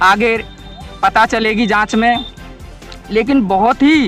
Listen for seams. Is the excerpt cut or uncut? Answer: uncut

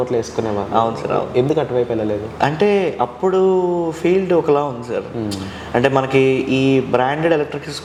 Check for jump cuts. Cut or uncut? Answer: uncut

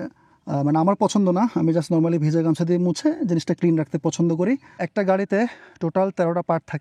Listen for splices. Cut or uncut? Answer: cut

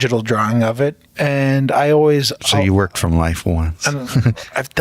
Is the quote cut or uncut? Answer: cut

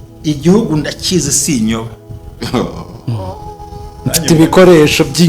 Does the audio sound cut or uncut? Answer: uncut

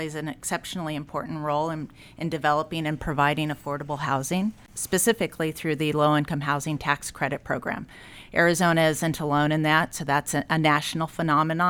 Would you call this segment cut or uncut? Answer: uncut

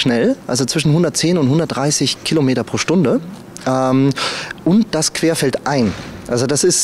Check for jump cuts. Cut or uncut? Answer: uncut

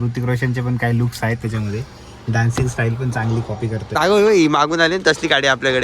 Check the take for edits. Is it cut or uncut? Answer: cut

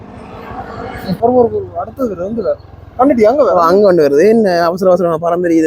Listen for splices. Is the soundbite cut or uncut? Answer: cut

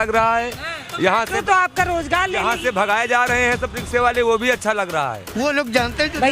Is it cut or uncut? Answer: cut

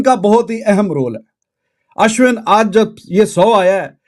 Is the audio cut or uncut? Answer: uncut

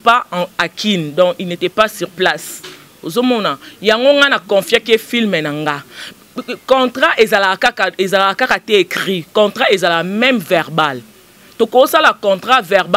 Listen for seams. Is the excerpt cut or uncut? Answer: uncut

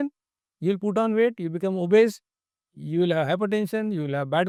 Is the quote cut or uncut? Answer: uncut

